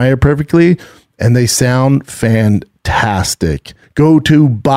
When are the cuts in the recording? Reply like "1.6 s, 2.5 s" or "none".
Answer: 3.8 s